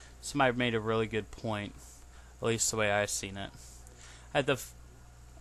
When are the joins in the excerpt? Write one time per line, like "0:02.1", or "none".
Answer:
0:02.2